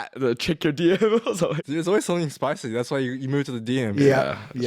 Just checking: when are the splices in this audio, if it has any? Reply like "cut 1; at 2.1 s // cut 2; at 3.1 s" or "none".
cut 1; at 1.6 s